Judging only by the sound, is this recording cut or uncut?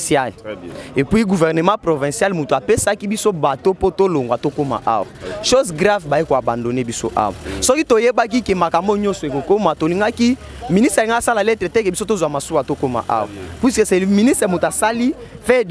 uncut